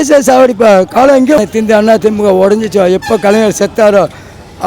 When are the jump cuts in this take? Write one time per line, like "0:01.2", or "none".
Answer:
0:01.4